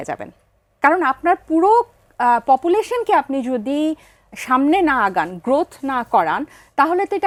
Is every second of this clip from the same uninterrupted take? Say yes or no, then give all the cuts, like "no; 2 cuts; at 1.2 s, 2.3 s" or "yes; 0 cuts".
yes; 0 cuts